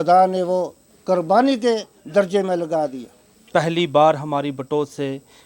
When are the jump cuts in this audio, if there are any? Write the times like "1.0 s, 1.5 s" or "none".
3.5 s